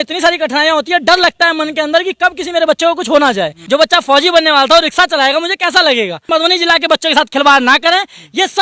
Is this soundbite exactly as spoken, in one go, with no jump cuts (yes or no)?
no